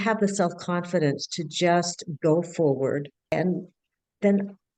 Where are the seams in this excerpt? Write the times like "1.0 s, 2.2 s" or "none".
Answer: 3.3 s